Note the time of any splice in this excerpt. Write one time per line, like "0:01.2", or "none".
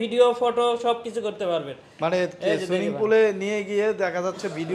none